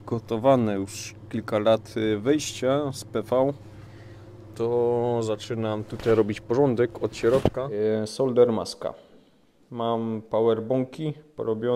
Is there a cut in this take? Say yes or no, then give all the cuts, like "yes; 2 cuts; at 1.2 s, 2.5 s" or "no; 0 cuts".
yes; 1 cut; at 7.7 s